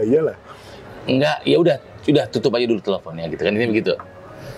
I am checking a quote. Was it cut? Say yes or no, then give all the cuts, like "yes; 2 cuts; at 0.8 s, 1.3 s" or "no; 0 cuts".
no; 0 cuts